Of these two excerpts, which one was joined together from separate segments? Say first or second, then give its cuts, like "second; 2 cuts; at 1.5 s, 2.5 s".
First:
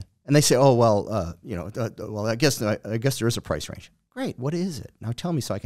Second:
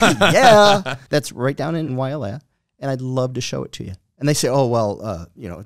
second; 2 cuts; at 1.0 s, 1.9 s